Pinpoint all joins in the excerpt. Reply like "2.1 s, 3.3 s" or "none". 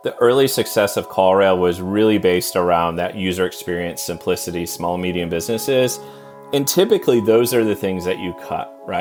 none